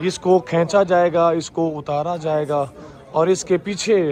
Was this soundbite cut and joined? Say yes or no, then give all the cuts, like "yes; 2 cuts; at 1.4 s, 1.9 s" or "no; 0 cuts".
no; 0 cuts